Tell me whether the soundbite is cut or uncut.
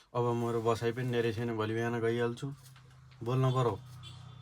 uncut